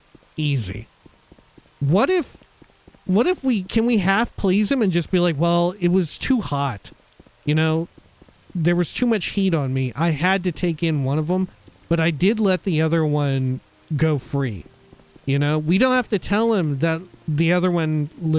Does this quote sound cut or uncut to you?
uncut